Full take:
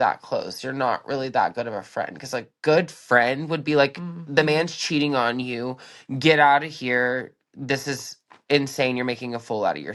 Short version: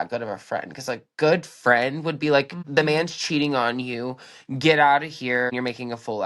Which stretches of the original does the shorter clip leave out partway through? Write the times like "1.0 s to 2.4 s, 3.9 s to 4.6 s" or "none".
4.0 s to 4.2 s, 7.1 s to 8.9 s